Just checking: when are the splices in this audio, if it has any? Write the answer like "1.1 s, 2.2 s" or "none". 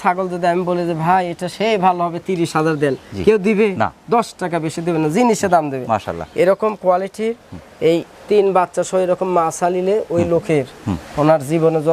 none